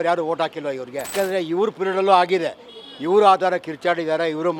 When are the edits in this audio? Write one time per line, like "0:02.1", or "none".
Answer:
0:01.1